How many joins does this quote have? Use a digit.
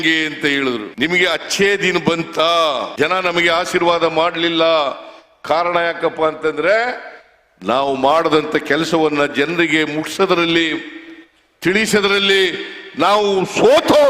1